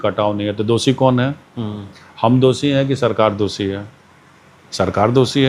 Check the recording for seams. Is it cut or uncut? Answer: uncut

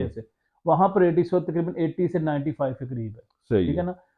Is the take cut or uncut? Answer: uncut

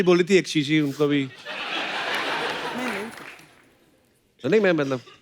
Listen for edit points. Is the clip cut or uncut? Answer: uncut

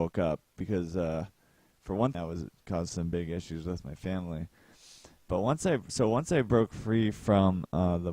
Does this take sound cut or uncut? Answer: uncut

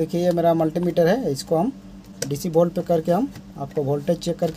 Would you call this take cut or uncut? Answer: cut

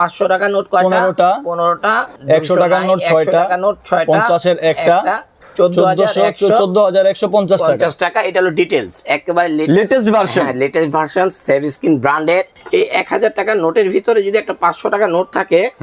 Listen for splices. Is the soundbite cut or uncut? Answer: cut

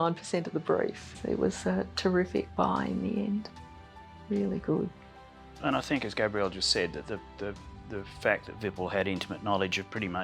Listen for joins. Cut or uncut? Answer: uncut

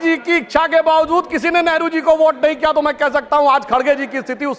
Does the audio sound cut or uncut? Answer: uncut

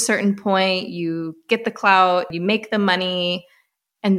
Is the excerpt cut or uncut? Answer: cut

